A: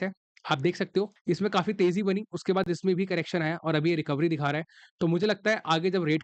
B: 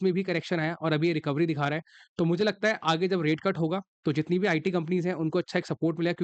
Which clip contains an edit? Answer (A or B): A